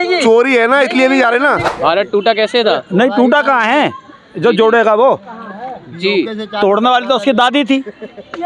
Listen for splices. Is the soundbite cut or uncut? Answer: cut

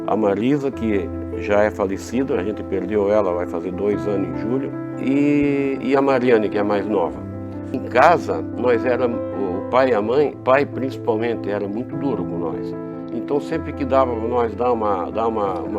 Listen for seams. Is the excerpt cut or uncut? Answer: cut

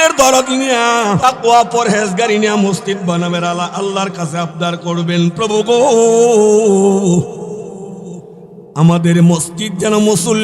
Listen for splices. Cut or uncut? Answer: cut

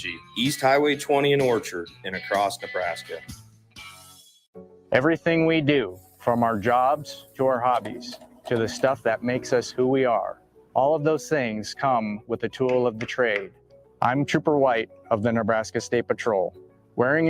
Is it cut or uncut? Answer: cut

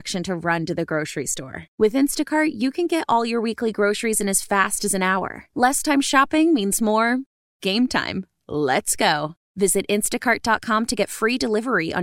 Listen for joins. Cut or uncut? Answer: uncut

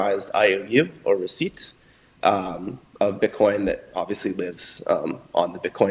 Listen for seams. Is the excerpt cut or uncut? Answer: uncut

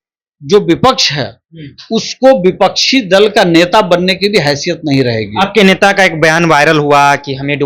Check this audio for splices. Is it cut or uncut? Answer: uncut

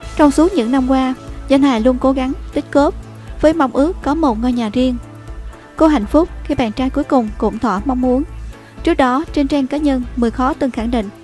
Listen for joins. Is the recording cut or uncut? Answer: cut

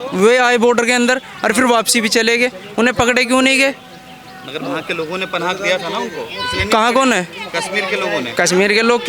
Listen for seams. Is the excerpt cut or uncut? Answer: uncut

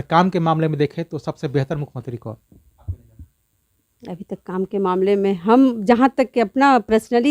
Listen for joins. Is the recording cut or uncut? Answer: uncut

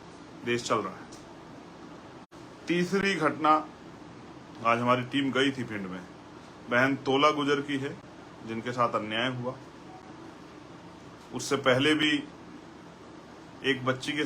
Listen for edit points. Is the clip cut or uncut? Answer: uncut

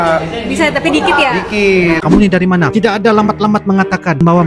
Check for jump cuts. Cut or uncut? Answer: cut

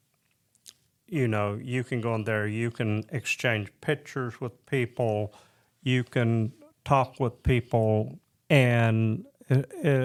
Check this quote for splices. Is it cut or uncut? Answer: uncut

